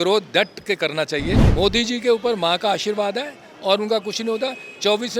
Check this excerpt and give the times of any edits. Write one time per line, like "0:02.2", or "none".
0:01.4